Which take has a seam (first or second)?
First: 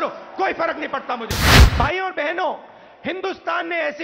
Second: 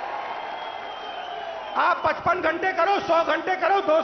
first